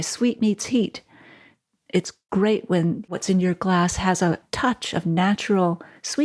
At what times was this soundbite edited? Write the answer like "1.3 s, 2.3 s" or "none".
2.2 s, 3.0 s